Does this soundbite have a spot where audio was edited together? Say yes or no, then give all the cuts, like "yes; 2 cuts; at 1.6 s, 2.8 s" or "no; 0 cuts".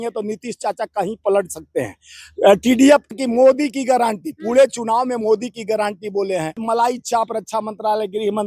yes; 2 cuts; at 3.1 s, 6.6 s